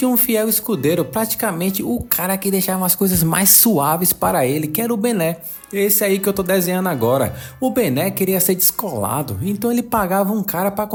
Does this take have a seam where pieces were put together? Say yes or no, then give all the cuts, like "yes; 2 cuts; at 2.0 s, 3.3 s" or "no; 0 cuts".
no; 0 cuts